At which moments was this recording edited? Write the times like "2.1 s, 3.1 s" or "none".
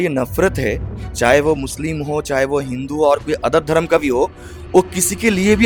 none